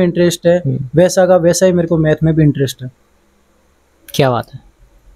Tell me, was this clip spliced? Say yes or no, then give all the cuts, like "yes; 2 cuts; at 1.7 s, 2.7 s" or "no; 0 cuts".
no; 0 cuts